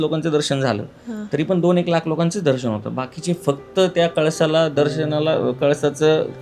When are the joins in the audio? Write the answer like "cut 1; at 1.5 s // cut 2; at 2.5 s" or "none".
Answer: none